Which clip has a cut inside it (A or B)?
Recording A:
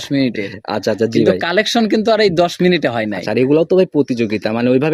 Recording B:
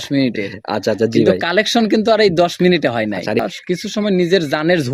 B